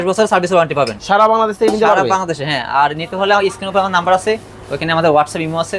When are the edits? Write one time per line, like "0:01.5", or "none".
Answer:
none

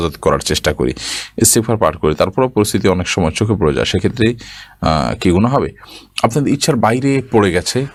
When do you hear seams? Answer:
none

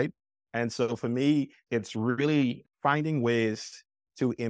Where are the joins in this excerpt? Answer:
0:01.6
0:02.6

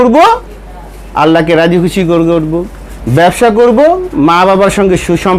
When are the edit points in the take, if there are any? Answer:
none

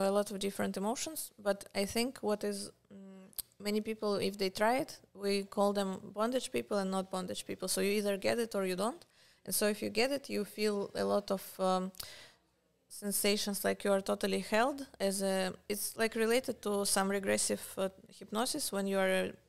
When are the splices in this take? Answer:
none

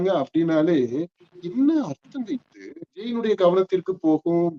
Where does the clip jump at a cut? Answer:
0:03.1

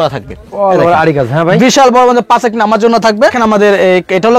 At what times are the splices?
0:03.4

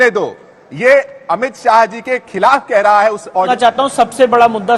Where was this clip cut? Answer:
0:03.5

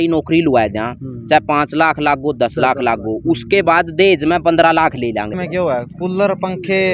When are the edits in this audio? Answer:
0:05.4

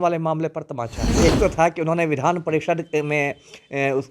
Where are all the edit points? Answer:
0:01.1

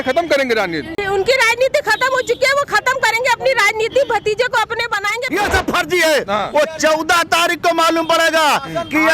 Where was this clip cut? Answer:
0:01.0
0:05.2

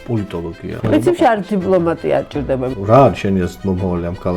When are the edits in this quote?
0:00.8
0:02.8

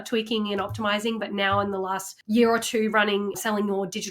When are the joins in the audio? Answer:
0:02.1
0:03.4

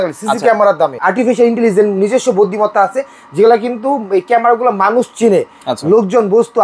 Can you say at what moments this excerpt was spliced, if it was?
0:00.9

